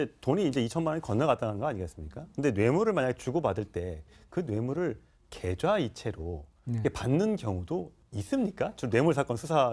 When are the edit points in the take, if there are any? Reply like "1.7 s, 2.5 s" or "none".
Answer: 7.3 s